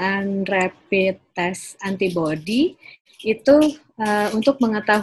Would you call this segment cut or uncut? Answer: uncut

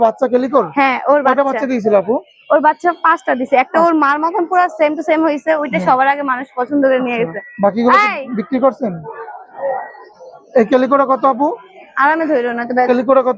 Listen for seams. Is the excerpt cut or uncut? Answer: uncut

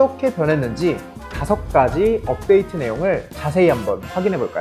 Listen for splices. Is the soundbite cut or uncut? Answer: uncut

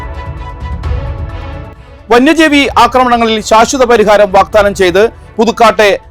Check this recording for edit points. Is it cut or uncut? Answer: uncut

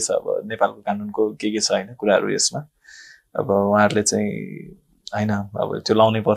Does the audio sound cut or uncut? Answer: uncut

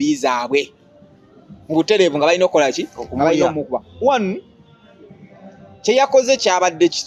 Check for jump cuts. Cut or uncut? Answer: uncut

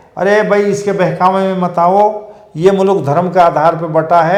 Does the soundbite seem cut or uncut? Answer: uncut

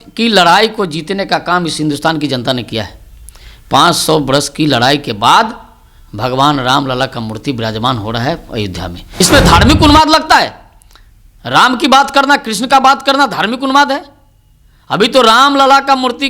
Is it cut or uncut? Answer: cut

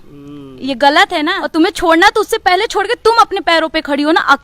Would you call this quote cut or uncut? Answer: cut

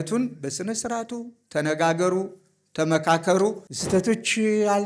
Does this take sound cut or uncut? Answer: cut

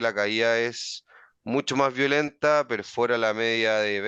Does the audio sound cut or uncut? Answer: uncut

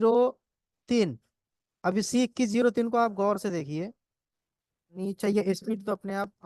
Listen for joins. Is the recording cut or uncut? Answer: cut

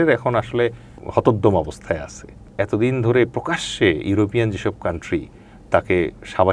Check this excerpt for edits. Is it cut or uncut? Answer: cut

